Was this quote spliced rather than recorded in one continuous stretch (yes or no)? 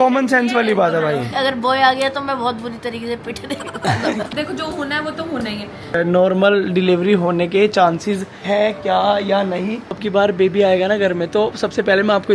yes